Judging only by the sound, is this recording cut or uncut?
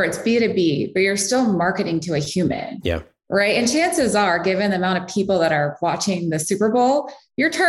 uncut